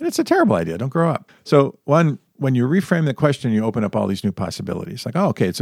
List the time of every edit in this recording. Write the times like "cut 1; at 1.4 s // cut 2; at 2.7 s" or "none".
cut 1; at 1.3 s // cut 2; at 2.2 s